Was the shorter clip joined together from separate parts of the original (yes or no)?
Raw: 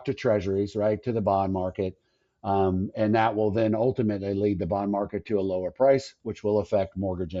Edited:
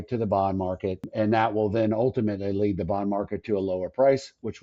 yes